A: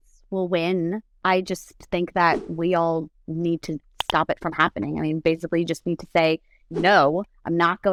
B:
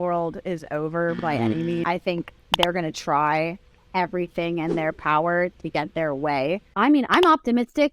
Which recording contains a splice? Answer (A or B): B